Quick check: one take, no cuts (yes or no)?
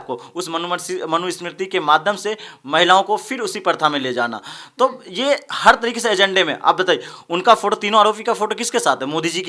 yes